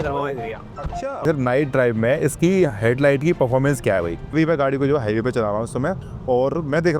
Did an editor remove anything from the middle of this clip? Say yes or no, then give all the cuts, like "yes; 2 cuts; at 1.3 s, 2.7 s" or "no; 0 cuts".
yes; 2 cuts; at 1.2 s, 4.3 s